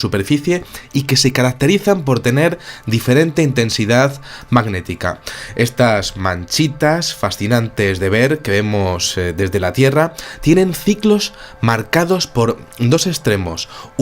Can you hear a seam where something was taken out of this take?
yes; 1 cut; at 12.7 s

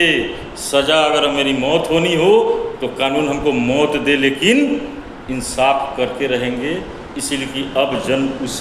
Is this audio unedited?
no; 1 cut; at 2.2 s

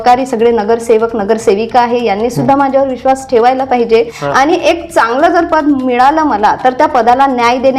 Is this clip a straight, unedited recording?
no; 1 cut; at 4.2 s

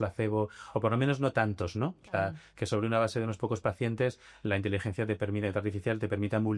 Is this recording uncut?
yes; 0 cuts

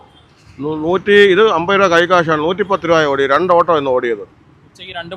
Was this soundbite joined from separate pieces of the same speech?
no; 0 cuts

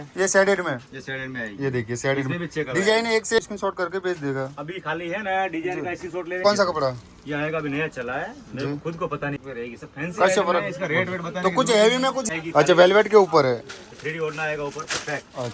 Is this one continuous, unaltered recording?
no; 4 cuts; at 3.4 s, 6.4 s, 9.4 s, 12.3 s

